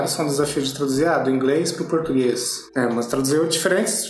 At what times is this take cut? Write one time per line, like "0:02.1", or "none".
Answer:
0:02.6